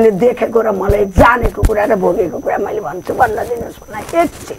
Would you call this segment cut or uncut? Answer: uncut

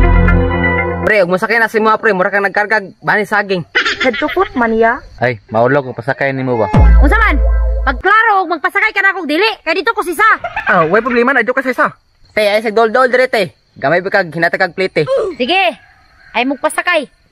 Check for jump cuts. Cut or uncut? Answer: uncut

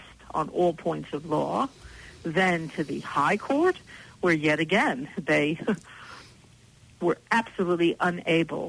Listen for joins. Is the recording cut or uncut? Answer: uncut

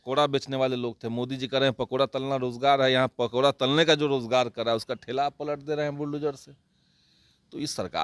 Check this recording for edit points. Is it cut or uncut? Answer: uncut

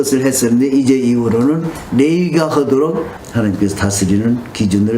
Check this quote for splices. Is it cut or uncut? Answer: cut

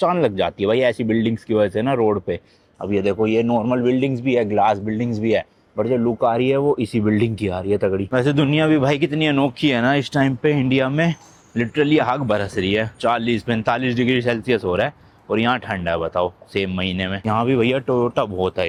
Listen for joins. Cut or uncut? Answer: uncut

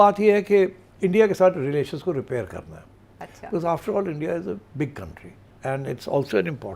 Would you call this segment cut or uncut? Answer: uncut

